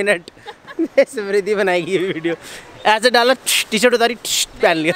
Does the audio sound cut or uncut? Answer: uncut